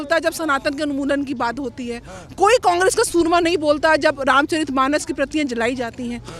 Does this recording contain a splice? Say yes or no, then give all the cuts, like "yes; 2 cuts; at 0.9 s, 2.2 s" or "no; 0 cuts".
no; 0 cuts